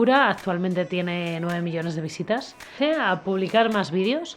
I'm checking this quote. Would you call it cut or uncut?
cut